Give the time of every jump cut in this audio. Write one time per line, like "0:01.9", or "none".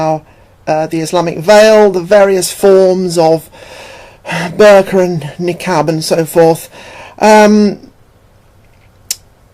0:06.5